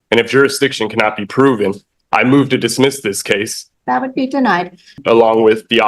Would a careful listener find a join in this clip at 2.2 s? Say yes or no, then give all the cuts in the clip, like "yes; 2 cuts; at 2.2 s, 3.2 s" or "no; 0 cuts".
no; 2 cuts; at 3.6 s, 5.0 s